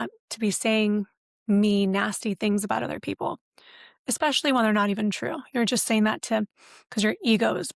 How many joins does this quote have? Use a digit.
0